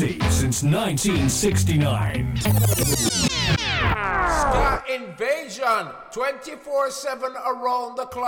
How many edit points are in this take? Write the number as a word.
one